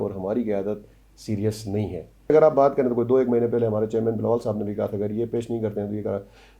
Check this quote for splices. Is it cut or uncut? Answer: cut